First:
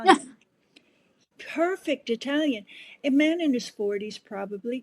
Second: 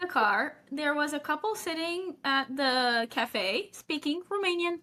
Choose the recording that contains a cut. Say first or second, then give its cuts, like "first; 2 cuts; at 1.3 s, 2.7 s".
first; 2 cuts; at 1.2 s, 3.0 s